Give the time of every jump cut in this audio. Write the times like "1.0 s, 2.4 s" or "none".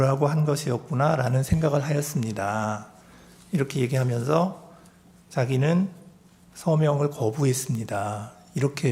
none